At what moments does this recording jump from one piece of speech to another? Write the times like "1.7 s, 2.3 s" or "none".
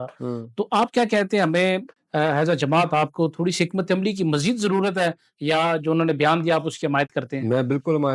1.9 s